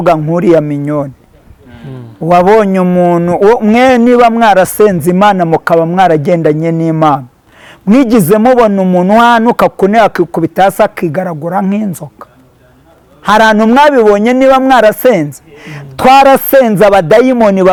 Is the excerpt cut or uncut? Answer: uncut